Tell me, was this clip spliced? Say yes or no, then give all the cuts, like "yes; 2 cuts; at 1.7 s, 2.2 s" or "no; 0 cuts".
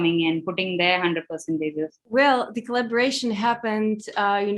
yes; 1 cut; at 2.0 s